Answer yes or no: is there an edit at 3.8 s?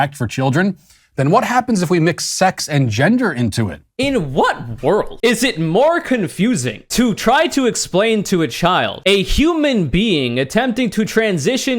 yes